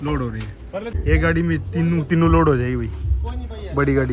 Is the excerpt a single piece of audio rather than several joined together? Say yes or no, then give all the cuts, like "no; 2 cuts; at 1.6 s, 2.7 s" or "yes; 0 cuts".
no; 1 cut; at 0.9 s